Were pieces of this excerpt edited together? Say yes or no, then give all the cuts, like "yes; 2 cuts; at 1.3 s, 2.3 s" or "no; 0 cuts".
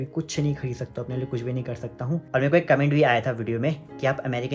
yes; 1 cut; at 2.2 s